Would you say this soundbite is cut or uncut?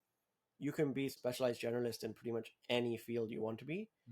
cut